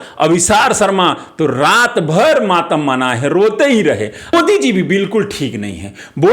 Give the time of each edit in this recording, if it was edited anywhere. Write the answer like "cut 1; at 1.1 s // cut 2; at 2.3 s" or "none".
cut 1; at 4.3 s